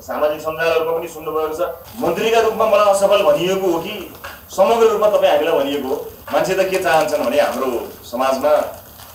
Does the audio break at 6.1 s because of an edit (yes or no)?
yes